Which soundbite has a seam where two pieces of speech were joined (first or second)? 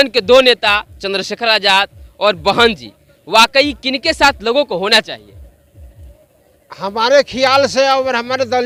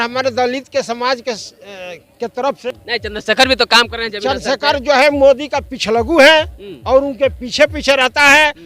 second